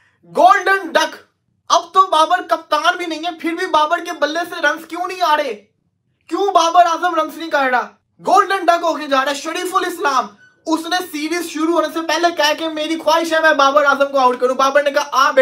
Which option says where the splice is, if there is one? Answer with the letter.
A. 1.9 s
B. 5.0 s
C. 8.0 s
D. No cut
D